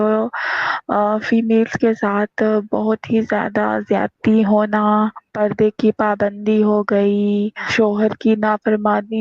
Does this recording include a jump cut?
yes; 2 cuts; at 5.3 s, 7.7 s

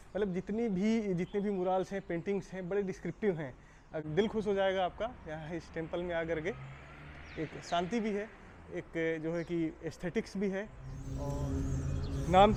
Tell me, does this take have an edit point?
no; 0 cuts

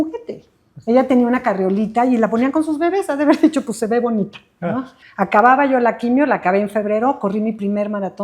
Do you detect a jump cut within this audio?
yes; 1 cut; at 5.0 s

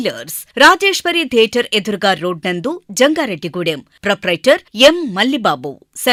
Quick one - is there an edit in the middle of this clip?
no; 0 cuts

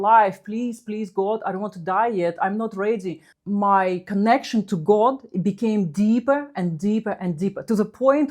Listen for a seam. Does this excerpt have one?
yes; 1 cut; at 3.3 s

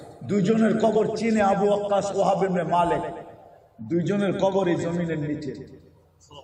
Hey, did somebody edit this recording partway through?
no; 0 cuts

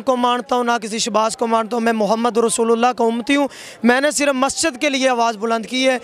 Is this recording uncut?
yes; 0 cuts

